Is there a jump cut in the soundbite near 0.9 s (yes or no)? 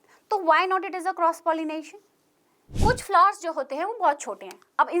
no